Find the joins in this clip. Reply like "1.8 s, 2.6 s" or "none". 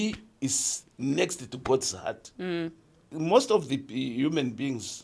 3.2 s